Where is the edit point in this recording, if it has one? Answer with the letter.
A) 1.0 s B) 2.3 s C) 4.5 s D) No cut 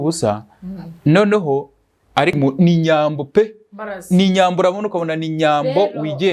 B